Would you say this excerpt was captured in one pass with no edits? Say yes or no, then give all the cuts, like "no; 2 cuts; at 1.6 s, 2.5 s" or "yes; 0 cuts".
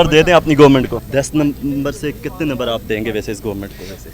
no; 1 cut; at 1.0 s